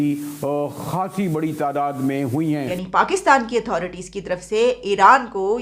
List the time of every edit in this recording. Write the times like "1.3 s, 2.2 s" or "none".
2.8 s